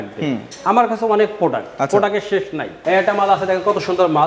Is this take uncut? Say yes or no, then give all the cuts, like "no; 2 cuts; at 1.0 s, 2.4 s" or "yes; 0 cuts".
no; 1 cut; at 2.6 s